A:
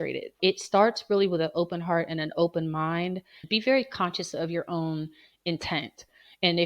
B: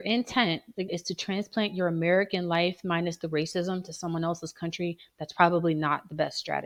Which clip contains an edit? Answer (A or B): A